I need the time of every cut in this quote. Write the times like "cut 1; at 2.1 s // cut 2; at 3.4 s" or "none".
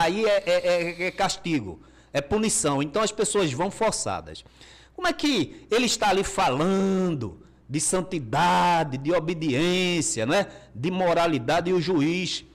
none